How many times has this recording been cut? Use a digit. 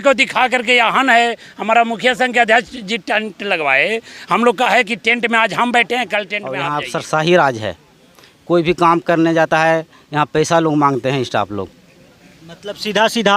1